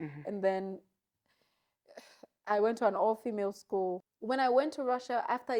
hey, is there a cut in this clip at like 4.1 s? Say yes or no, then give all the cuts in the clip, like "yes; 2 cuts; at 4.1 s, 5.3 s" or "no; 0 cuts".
yes; 1 cut; at 4.1 s